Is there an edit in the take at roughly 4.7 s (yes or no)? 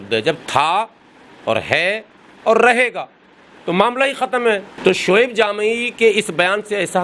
yes